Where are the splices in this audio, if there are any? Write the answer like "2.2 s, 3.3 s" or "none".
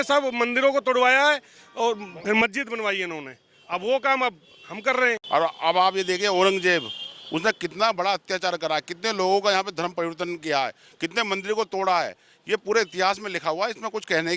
5.2 s